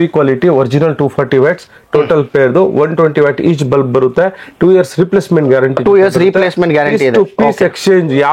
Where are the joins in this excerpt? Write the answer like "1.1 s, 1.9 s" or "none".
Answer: none